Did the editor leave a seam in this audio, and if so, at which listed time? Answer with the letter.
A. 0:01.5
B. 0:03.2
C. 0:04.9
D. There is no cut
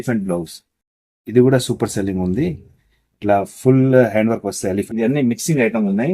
C